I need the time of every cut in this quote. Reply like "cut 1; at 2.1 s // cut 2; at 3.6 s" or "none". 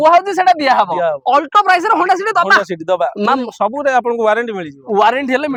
none